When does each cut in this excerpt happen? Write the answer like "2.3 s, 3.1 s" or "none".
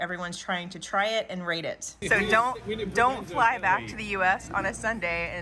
2.0 s